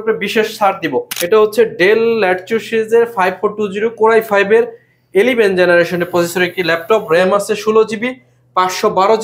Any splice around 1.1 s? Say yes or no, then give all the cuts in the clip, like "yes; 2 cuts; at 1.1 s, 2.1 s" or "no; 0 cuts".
yes; 1 cut; at 1.1 s